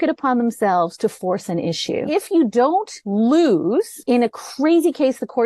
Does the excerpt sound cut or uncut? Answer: cut